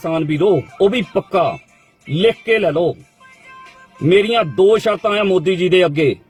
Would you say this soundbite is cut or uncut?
uncut